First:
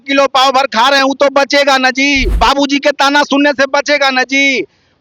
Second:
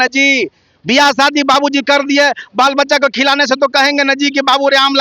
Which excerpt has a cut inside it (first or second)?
first